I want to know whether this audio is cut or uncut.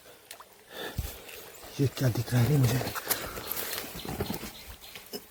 uncut